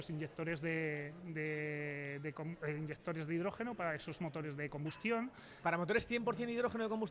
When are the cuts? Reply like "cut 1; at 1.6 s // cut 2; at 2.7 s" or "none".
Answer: none